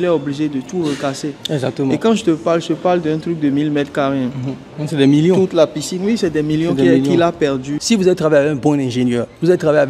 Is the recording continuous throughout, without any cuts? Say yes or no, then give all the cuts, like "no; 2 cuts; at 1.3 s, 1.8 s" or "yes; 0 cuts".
no; 1 cut; at 7.8 s